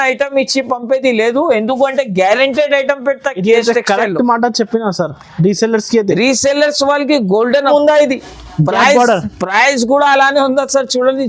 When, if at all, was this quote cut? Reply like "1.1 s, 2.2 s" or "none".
7.7 s